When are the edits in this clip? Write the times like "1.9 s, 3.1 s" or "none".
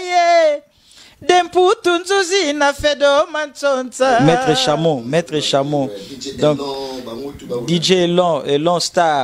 4.2 s